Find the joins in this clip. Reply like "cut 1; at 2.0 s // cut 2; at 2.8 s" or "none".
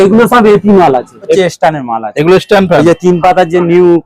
cut 1; at 1.4 s